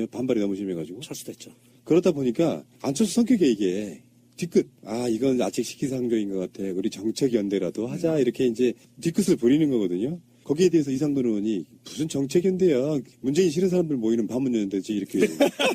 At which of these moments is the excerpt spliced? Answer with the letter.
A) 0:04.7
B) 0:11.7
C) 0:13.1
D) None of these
C